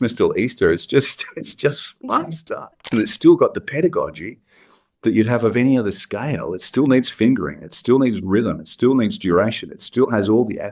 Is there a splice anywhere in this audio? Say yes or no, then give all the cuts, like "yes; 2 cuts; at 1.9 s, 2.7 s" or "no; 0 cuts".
yes; 1 cut; at 2.9 s